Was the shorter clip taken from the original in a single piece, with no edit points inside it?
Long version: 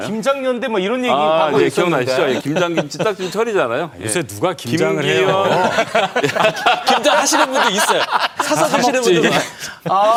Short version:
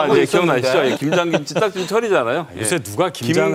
yes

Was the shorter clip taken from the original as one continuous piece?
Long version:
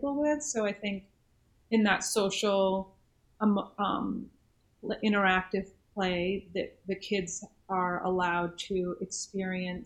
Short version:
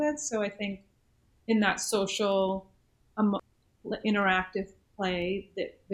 no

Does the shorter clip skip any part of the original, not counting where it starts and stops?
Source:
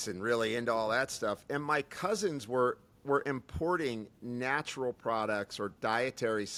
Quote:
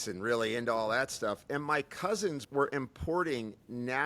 yes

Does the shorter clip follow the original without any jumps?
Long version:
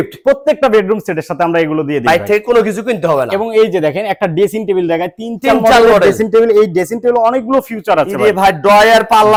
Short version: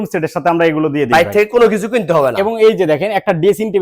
yes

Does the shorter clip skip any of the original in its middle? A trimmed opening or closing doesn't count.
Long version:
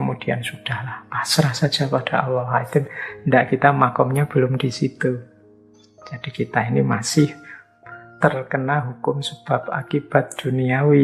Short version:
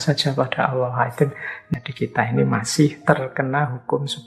yes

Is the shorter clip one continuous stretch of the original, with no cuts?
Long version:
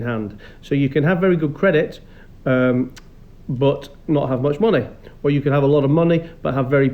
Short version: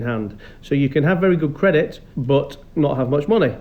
no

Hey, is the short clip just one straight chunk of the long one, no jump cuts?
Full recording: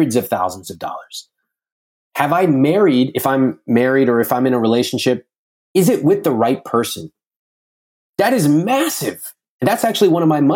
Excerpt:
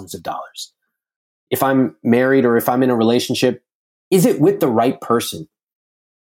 no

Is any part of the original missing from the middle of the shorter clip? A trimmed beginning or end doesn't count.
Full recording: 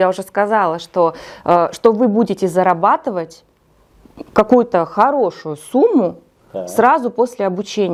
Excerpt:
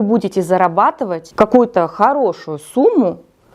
yes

